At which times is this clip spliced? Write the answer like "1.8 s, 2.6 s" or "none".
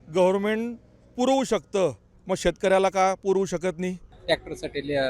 4.1 s